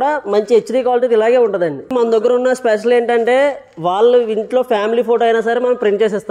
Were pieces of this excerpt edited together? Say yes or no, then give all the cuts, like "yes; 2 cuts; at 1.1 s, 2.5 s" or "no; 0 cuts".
yes; 1 cut; at 1.9 s